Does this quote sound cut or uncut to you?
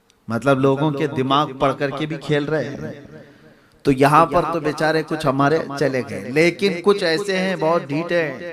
uncut